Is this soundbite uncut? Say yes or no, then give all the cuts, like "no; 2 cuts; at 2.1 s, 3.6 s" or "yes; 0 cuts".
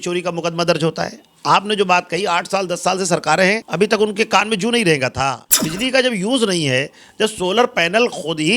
no; 2 cuts; at 3.7 s, 5.4 s